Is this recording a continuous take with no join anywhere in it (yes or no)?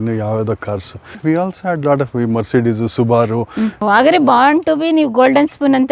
no